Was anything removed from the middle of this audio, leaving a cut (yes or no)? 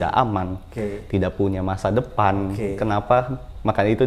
no